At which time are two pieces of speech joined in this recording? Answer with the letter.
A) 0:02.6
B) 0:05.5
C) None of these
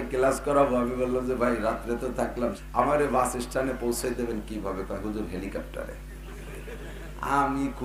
A